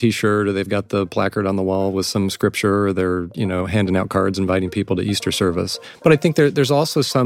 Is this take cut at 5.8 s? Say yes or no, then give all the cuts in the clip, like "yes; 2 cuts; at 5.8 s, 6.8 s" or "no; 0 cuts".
yes; 1 cut; at 5.8 s